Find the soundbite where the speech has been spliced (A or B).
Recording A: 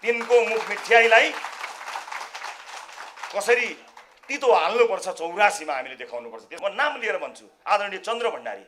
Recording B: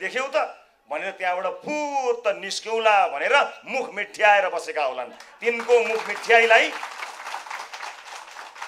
A